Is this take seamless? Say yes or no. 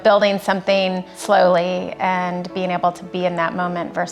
no